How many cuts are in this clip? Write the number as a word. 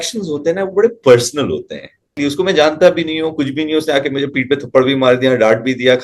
one